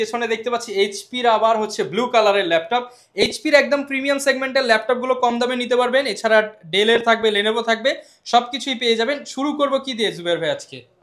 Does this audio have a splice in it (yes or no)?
no